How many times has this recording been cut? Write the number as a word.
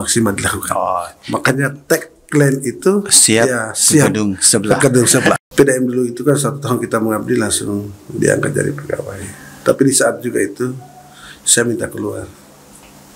one